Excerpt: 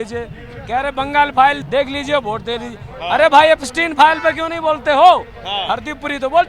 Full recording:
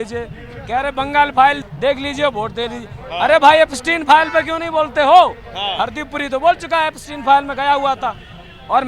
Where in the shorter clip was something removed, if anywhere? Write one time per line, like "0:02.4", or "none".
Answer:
0:01.6